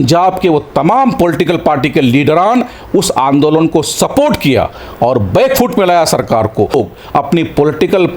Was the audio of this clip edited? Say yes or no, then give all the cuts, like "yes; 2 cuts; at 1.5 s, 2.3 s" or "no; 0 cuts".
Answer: yes; 1 cut; at 6.7 s